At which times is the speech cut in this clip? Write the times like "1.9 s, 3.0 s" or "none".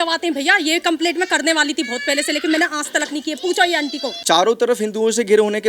4.2 s